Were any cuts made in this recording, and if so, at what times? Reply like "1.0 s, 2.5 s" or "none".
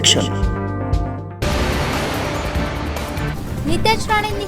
1.3 s, 3.3 s